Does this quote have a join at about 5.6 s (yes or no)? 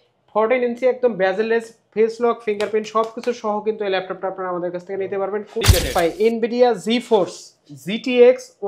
yes